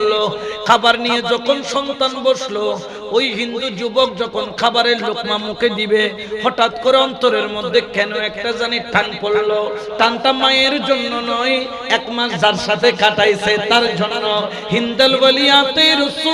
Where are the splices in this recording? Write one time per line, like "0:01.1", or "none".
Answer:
none